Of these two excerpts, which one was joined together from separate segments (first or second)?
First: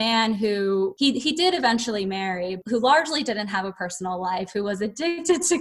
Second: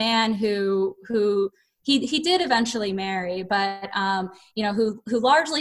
first